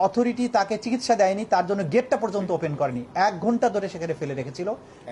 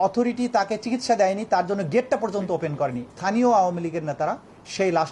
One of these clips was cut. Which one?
second; 1 cut; at 3.1 s

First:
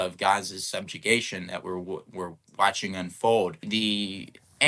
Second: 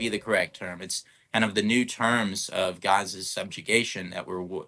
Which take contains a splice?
first; 1 cut; at 3.7 s

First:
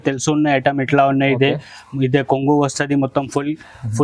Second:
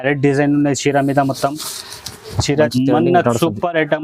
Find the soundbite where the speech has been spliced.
second; 1 cut; at 2.7 s

